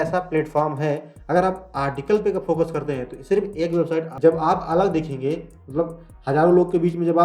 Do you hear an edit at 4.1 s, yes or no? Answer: yes